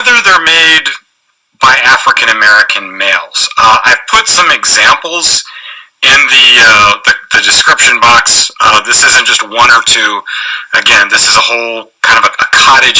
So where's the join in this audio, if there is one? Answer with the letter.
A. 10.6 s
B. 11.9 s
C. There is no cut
B